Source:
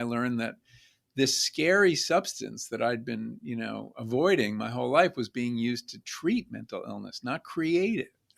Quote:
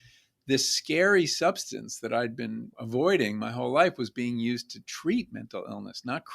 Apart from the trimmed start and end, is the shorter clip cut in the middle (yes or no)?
yes